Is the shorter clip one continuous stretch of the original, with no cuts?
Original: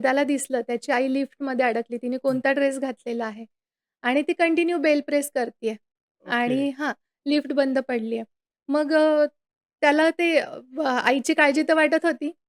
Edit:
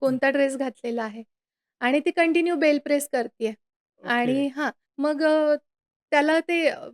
no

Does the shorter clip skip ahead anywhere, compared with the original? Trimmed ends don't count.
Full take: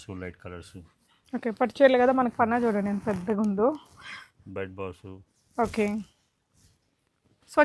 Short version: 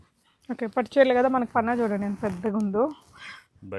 no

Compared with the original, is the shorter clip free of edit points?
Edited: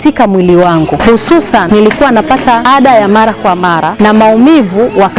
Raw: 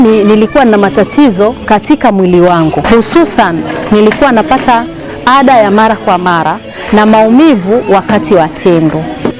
no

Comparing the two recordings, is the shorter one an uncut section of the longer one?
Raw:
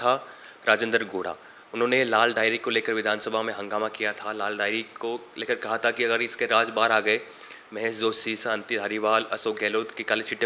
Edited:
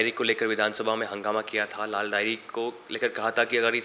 yes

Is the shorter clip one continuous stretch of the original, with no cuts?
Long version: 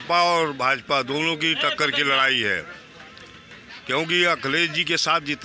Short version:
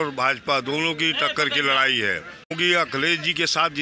no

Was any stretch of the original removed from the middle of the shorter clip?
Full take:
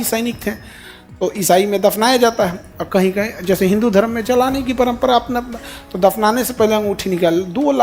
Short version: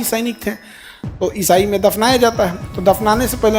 yes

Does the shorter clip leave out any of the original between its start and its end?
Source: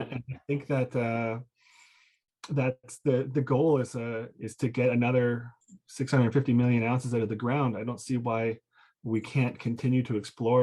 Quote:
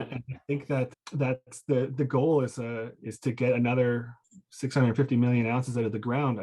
yes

